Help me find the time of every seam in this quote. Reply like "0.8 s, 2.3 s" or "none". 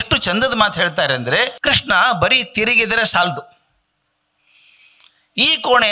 1.6 s